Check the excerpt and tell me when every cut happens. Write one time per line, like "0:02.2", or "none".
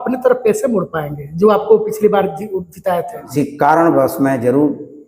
0:03.2